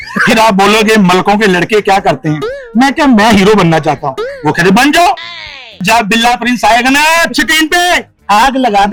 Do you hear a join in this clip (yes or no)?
no